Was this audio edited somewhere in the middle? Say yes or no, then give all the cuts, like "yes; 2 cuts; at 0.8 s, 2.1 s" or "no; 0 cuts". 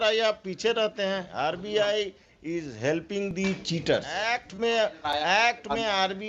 yes; 2 cuts; at 1.3 s, 4.4 s